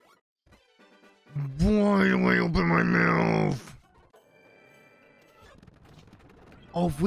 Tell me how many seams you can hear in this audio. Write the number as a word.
one